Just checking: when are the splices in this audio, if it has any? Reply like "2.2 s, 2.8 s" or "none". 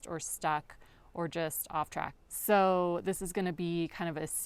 2.1 s